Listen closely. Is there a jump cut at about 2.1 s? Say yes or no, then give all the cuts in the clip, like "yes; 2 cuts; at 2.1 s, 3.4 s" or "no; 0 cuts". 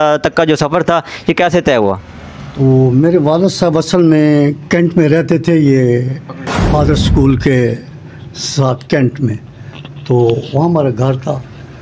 no; 0 cuts